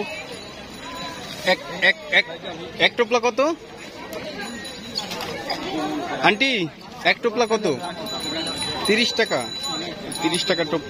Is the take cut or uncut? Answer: uncut